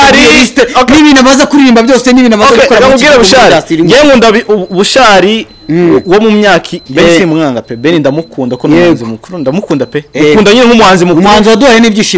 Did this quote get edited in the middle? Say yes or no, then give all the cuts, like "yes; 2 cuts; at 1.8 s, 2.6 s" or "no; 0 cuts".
yes; 1 cut; at 6.8 s